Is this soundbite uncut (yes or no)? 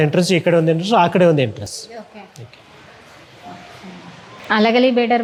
yes